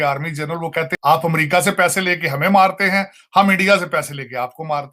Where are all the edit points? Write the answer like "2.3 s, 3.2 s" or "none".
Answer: 0.9 s

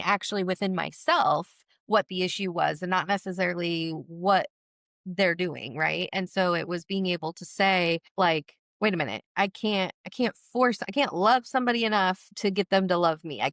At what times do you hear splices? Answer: none

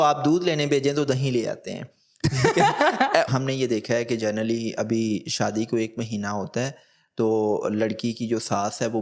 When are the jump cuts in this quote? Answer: 3.3 s

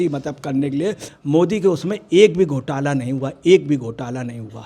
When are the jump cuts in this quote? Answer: 1.1 s

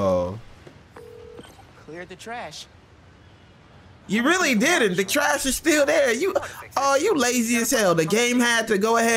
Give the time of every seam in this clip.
none

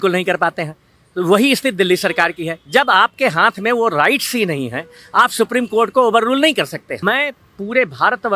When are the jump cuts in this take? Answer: 6.9 s

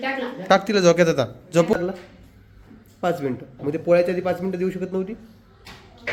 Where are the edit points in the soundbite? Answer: 1.7 s

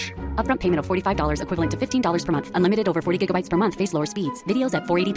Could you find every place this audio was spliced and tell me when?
none

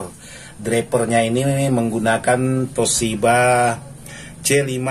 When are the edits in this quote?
none

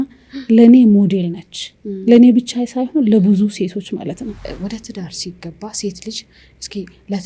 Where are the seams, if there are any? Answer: 4.5 s

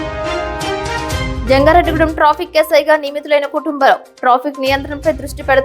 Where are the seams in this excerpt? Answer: 1.1 s

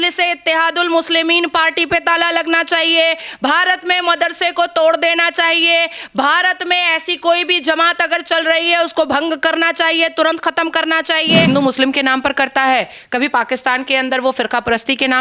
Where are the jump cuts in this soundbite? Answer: 11.5 s

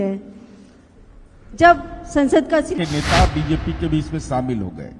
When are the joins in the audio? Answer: 2.7 s

